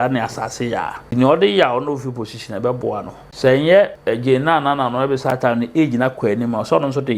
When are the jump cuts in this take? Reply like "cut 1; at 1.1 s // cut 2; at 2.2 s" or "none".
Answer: cut 1; at 1.0 s // cut 2; at 3.2 s // cut 3; at 4.0 s